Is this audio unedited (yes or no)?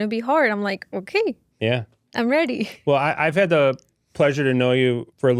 yes